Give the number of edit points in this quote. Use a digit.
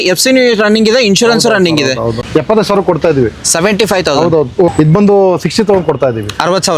2